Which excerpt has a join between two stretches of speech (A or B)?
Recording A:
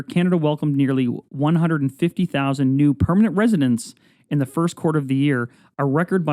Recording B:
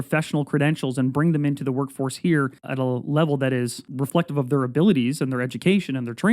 B